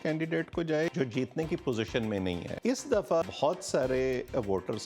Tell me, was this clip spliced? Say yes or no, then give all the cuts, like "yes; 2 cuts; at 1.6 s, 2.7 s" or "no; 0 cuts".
yes; 3 cuts; at 0.9 s, 2.5 s, 3.3 s